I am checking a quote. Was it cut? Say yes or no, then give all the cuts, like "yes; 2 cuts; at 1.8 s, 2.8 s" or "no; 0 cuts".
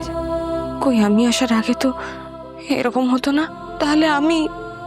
yes; 1 cut; at 3.6 s